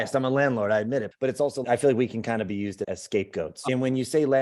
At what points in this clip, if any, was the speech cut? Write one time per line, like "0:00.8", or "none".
0:01.1
0:03.6